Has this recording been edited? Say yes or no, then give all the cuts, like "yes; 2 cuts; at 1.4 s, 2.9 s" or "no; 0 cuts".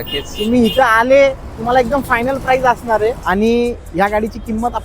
yes; 1 cut; at 3.2 s